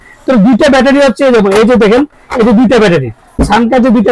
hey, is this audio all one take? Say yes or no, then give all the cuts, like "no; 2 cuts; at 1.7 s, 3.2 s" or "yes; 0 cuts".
yes; 0 cuts